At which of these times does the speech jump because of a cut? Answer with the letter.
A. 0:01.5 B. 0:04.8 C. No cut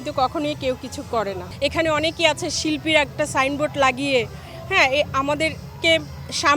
A